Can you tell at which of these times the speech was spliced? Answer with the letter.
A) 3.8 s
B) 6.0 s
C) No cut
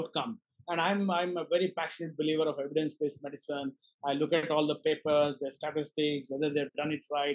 C